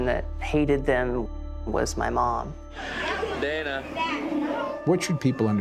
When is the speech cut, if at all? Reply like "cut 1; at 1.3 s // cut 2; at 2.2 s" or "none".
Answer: none